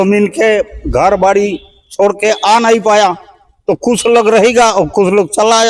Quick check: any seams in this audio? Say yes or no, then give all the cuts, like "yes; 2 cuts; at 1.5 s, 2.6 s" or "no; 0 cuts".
no; 0 cuts